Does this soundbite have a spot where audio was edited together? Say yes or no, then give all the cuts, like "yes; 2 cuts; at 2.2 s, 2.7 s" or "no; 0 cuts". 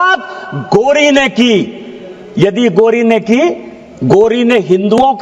no; 0 cuts